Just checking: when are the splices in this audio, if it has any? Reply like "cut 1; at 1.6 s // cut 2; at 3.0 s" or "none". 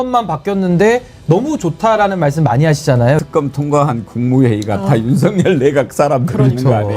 cut 1; at 3.2 s